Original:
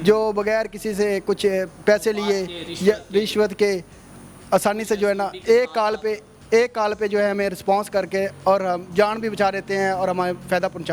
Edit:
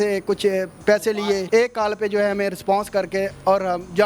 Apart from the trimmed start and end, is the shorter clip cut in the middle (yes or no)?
yes